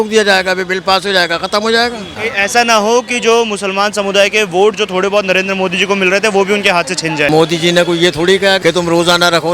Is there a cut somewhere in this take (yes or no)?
yes